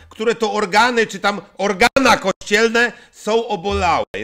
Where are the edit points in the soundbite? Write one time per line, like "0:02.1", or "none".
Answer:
none